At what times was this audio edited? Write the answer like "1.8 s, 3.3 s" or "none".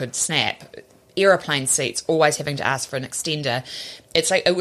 none